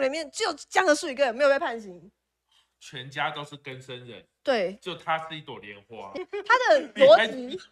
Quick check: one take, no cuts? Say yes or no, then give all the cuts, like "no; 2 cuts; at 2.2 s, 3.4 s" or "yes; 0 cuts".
no; 1 cut; at 6.1 s